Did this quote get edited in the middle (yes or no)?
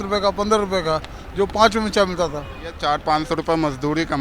yes